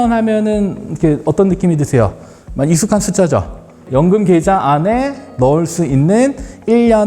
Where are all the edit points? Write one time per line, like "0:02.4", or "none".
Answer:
0:03.8